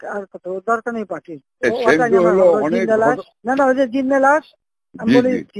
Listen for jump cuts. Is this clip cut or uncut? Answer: cut